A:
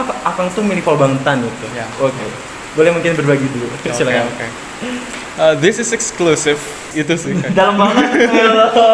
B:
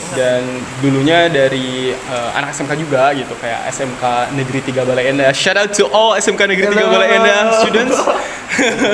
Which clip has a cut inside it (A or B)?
A